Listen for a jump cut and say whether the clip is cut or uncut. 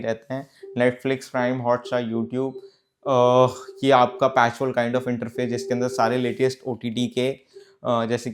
uncut